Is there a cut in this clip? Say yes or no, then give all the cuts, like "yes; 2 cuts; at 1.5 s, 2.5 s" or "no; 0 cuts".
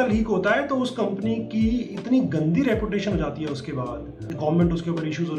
yes; 1 cut; at 4.3 s